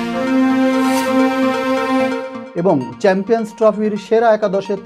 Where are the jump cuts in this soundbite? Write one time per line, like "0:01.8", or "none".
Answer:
0:02.3